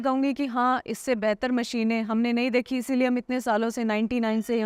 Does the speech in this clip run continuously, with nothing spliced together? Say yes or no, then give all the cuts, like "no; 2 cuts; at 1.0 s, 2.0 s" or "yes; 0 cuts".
yes; 0 cuts